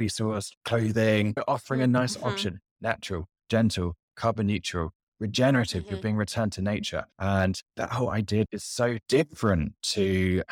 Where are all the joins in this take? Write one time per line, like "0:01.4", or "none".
0:01.4
0:07.1

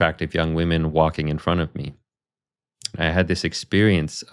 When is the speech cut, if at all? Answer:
0:02.9

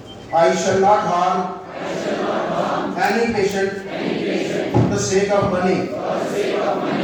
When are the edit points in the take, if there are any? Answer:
none

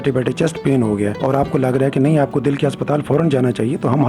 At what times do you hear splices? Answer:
none

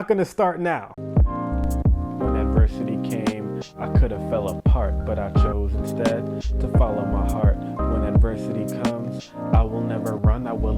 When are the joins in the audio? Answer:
0:01.4

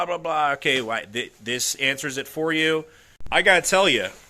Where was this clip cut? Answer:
0:03.2

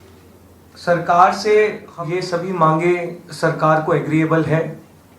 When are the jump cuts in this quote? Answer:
0:01.9

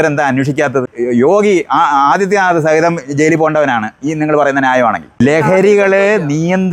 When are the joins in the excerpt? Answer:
0:00.9
0:05.2

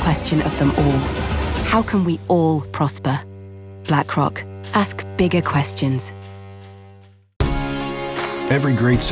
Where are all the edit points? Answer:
0:07.3

